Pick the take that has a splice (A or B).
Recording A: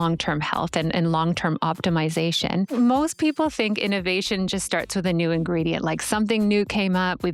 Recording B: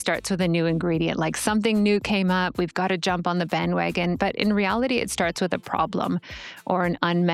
A